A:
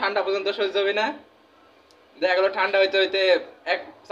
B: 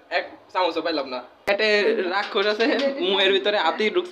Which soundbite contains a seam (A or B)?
B